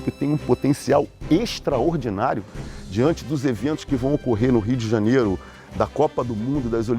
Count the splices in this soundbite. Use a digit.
0